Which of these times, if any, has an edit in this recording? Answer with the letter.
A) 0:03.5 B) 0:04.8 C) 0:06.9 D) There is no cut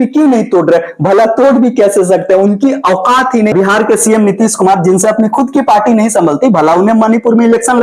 A